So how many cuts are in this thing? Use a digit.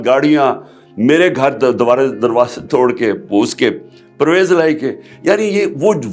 0